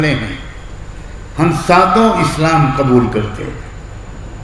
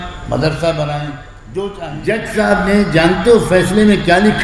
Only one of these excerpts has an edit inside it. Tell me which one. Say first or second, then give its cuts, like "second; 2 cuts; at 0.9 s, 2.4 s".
second; 1 cut; at 1.7 s